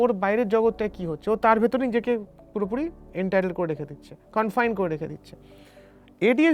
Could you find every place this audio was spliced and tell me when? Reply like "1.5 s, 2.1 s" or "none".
none